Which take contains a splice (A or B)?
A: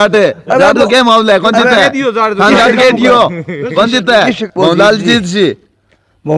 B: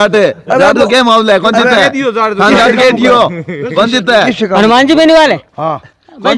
A